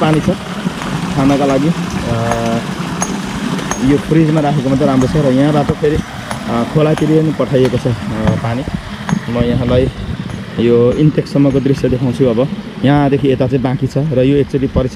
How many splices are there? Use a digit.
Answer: 0